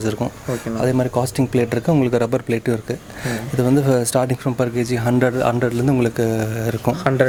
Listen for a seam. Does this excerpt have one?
no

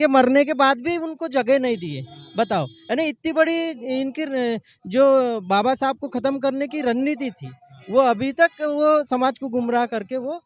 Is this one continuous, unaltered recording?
yes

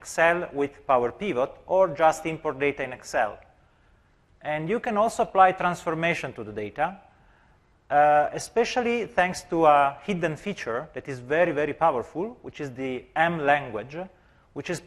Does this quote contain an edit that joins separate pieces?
yes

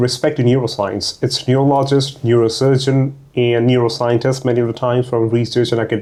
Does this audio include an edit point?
no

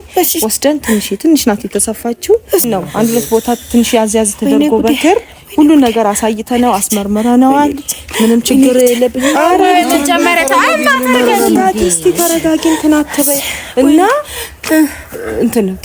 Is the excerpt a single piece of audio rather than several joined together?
no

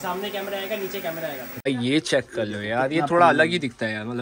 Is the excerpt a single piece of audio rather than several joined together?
no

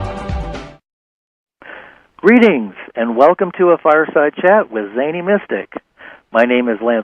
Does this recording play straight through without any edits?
yes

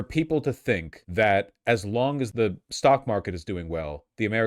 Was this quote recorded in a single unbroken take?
no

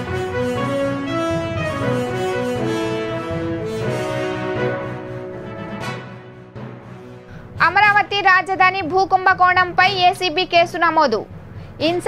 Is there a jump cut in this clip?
no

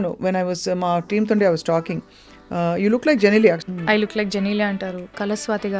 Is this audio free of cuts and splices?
no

